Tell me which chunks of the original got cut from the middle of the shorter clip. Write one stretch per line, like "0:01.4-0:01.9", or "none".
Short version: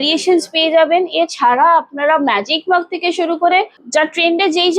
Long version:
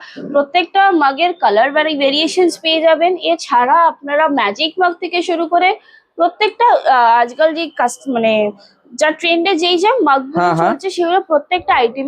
0:05.9-0:08.8